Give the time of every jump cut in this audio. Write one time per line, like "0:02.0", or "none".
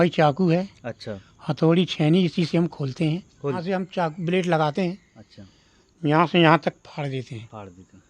0:03.6